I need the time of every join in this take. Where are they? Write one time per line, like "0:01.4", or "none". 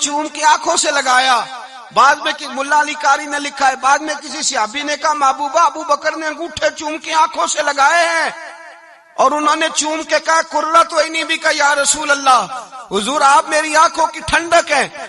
none